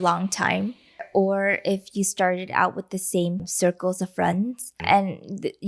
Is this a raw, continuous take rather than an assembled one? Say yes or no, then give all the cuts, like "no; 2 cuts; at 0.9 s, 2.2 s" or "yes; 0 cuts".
no; 3 cuts; at 1.0 s, 3.5 s, 4.8 s